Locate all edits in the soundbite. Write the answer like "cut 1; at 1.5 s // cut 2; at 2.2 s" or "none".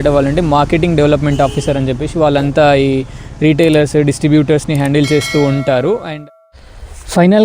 cut 1; at 6.0 s